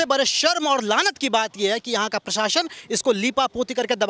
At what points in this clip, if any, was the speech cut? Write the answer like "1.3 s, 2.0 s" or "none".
none